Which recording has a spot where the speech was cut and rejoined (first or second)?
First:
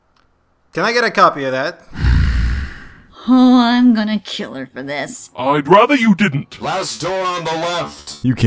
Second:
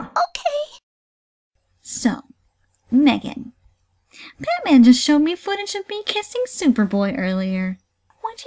second